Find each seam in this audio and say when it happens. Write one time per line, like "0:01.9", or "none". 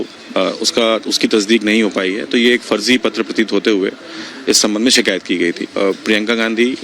0:05.7